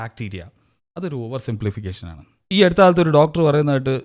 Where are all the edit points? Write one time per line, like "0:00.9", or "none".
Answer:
0:02.5

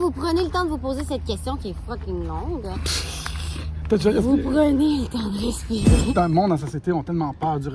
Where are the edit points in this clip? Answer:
0:06.1

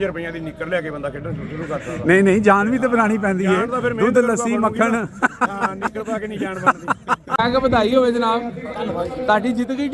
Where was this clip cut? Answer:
0:07.4

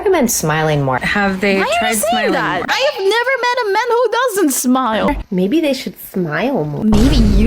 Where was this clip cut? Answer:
0:05.1

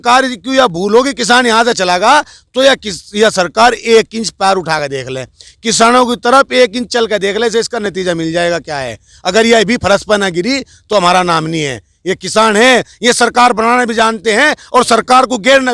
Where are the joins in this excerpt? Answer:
none

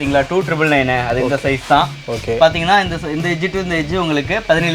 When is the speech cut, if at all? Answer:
none

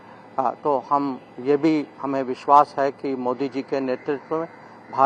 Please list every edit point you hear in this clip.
none

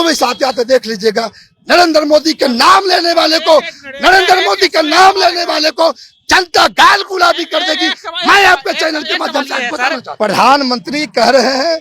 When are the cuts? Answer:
0:10.1

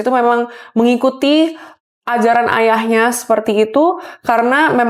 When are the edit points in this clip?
none

